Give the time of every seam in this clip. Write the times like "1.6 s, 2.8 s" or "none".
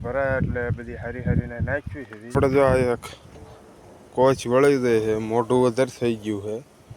2.3 s